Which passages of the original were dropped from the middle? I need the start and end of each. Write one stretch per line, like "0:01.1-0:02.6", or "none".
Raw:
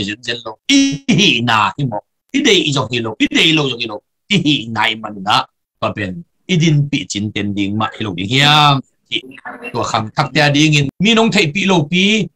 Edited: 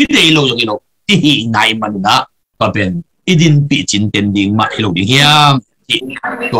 none